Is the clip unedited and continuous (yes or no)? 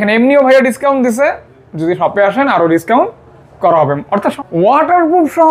no